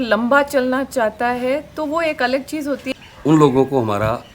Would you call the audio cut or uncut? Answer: cut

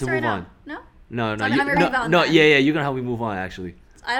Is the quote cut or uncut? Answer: uncut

